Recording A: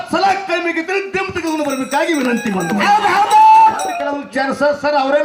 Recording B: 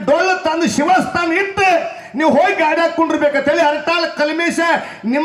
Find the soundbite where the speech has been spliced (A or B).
A